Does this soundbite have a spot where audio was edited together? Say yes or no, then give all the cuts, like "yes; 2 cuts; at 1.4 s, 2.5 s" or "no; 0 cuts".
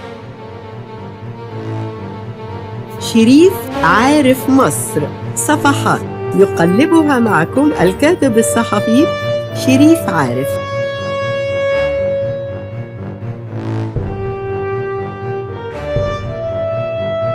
no; 0 cuts